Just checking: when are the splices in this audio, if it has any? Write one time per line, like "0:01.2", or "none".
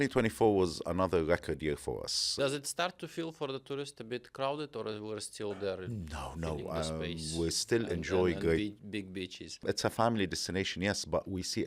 0:02.5
0:09.5

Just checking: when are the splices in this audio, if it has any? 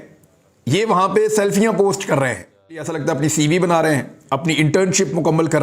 0:02.9

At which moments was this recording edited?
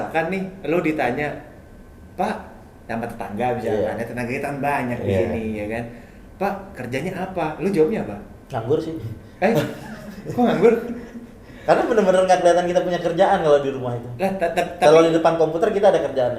none

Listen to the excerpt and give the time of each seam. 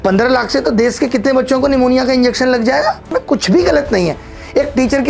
0:03.1

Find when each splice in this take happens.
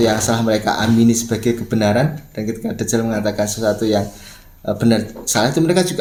none

